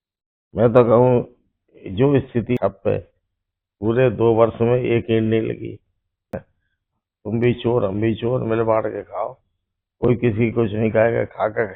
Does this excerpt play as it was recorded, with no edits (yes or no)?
no